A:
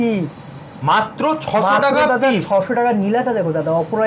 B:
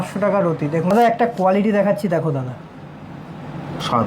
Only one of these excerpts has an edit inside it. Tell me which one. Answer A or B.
B